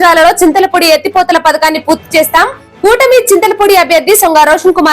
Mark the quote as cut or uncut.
uncut